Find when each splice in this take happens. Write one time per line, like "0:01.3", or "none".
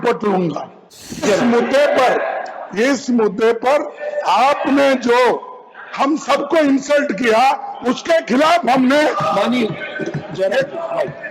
0:01.2

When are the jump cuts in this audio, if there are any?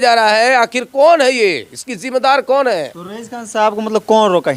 none

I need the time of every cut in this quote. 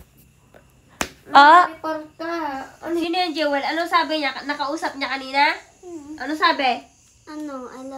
0:03.0

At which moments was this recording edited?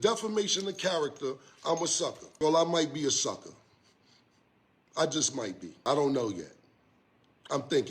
0:02.2
0:05.7

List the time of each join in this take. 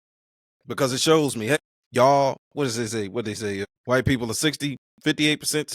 0:01.6
0:03.7
0:04.9

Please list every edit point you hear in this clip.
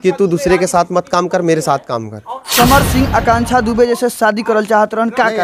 0:02.5

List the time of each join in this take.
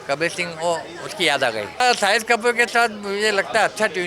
0:01.7

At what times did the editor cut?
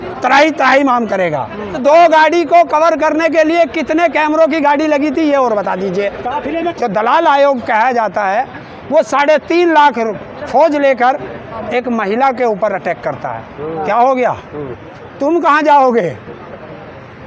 0:01.8
0:06.7
0:13.7

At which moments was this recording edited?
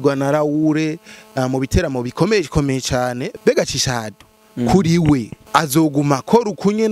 0:03.3
0:05.4

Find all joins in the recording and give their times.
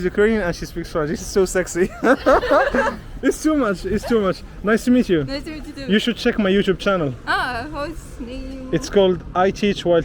none

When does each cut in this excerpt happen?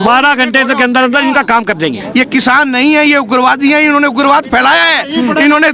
0:02.0

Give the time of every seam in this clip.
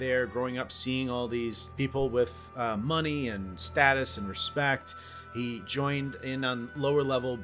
0:01.6

